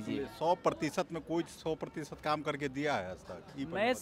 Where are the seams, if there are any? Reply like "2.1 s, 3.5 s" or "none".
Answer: none